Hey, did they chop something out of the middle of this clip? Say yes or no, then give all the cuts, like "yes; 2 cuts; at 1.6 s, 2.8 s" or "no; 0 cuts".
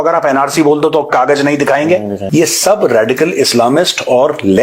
yes; 1 cut; at 2.7 s